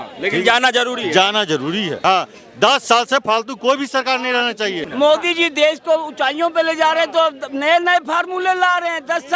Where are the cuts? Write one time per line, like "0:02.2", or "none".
0:01.9
0:04.8